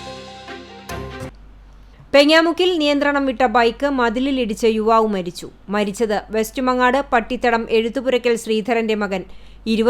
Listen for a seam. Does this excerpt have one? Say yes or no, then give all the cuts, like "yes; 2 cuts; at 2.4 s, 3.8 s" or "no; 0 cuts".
yes; 1 cut; at 1.3 s